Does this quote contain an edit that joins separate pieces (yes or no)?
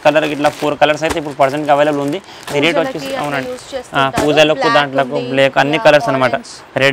no